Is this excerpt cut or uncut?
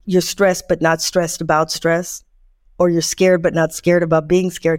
uncut